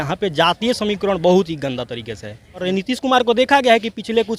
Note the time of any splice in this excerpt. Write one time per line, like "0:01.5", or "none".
0:02.6